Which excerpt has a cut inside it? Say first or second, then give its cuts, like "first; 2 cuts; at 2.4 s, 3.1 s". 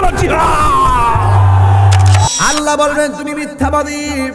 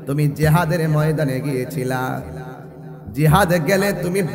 first; 1 cut; at 2.3 s